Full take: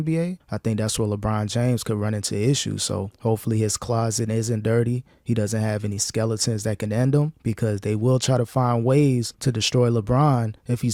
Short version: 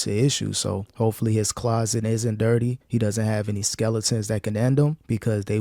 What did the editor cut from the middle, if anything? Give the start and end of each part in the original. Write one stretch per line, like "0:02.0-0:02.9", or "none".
0:05.0-0:05.2